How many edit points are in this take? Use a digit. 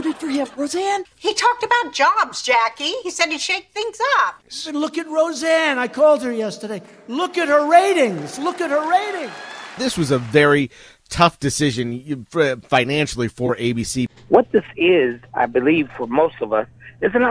4